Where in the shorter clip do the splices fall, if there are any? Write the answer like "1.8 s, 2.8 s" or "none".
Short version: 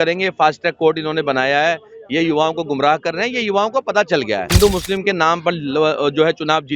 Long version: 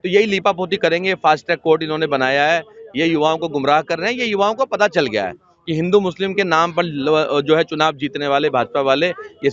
4.5 s